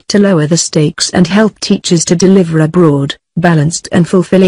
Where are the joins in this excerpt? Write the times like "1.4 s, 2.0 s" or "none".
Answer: 3.5 s